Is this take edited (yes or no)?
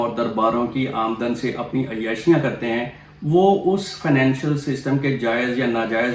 no